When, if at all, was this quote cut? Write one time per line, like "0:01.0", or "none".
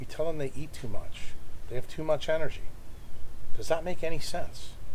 none